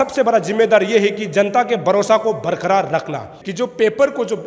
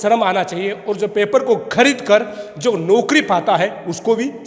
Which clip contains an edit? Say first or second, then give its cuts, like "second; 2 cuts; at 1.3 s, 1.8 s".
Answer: first; 1 cut; at 3.3 s